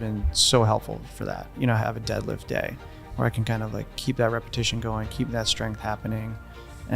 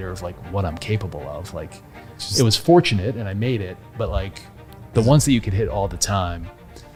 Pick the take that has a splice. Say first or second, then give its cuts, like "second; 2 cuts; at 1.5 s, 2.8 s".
first; 1 cut; at 1.5 s